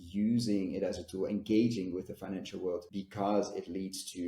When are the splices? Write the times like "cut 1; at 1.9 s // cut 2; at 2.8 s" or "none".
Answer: cut 1; at 2.9 s